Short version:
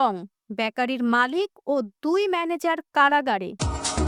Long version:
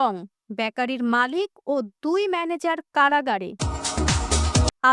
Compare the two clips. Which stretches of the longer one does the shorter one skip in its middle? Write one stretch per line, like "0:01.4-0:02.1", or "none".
none